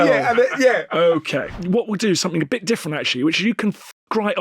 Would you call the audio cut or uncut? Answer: cut